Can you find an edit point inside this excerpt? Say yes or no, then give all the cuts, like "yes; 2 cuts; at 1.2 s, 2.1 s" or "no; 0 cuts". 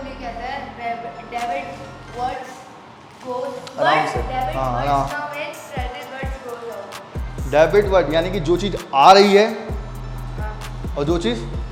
no; 0 cuts